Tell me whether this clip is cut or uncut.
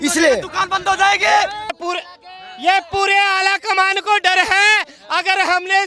cut